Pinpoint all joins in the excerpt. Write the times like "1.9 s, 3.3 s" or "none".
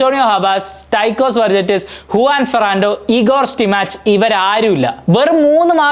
5.0 s